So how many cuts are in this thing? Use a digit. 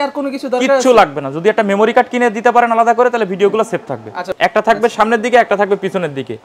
1